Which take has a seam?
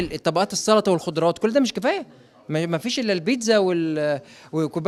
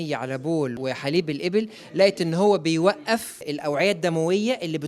second; 1 cut; at 3.5 s

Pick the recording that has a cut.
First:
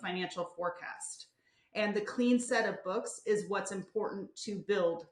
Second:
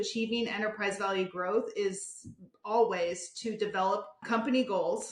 second; 1 cut; at 4.2 s

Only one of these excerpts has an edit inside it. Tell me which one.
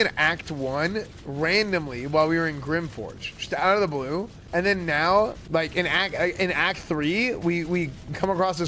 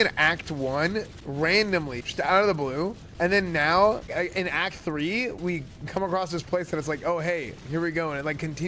second; 3 cuts; at 2.0 s, 4.1 s, 5.4 s

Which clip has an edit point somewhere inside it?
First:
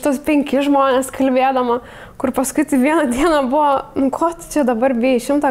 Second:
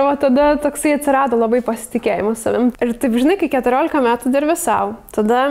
second; 1 cut; at 2.7 s

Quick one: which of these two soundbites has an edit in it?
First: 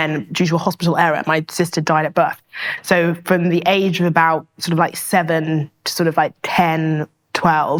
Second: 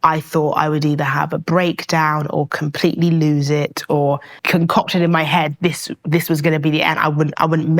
second; 1 cut; at 4.3 s

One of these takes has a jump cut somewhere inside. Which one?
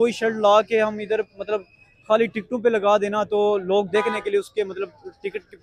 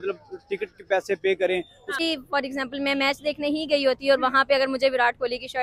second; 1 cut; at 2.0 s

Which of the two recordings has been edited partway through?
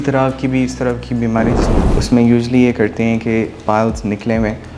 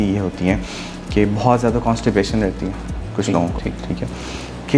first; 1 cut; at 1.6 s

